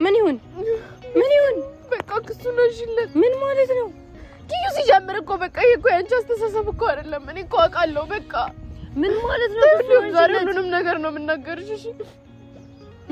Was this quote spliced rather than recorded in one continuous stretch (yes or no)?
no